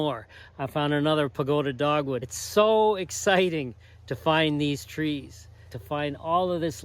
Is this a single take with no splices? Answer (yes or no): no